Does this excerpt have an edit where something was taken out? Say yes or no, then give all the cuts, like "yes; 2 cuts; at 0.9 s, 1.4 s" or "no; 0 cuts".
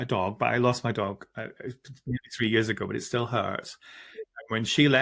no; 0 cuts